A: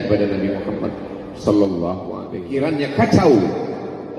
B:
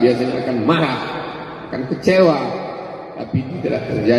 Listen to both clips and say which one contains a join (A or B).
A